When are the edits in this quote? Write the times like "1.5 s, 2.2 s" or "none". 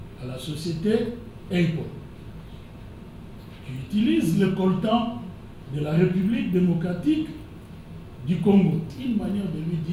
8.9 s